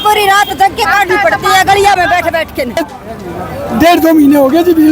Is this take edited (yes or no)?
yes